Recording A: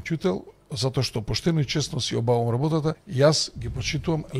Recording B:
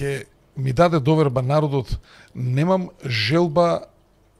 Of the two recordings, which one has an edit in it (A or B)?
A